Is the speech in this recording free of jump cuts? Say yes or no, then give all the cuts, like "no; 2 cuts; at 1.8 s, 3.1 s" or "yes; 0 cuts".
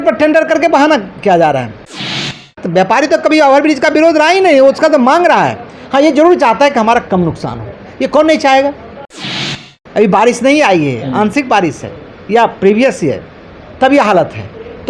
no; 2 cuts; at 2.2 s, 9.4 s